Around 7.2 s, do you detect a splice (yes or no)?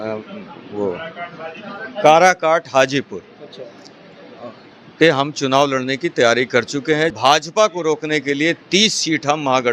yes